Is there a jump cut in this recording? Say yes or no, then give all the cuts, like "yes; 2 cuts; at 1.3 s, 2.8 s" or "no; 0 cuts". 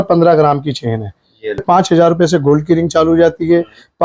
yes; 1 cut; at 1.6 s